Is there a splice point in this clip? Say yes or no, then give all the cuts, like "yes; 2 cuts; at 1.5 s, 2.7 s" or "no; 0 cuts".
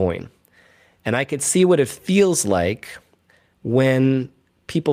no; 0 cuts